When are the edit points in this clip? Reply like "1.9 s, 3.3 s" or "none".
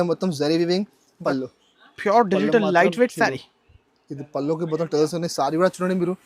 1.1 s